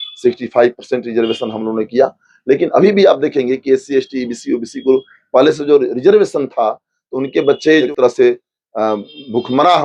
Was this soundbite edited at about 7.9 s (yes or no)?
yes